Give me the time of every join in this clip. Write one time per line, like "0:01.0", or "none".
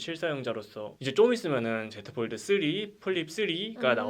0:00.9